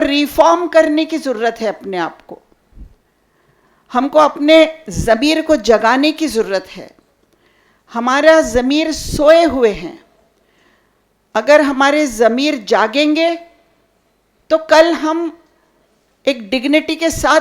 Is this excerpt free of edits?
yes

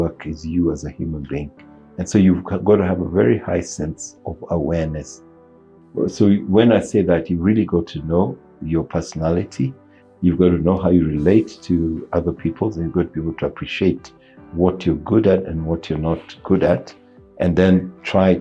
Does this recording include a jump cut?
no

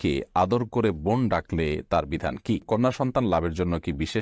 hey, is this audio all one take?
no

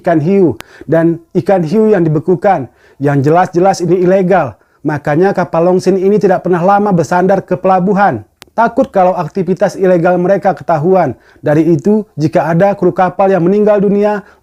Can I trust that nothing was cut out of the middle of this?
yes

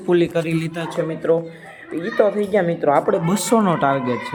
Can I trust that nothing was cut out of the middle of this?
yes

